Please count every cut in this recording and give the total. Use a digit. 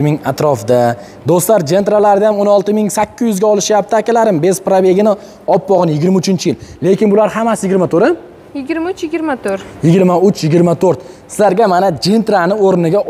0